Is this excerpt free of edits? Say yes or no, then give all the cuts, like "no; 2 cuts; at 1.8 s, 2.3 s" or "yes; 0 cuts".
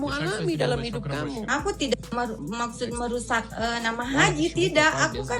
no; 1 cut; at 1.5 s